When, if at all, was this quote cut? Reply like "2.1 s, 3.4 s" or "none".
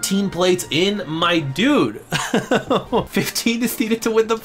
3.1 s